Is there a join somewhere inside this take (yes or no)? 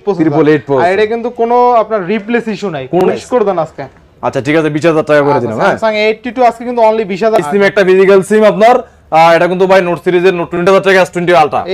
yes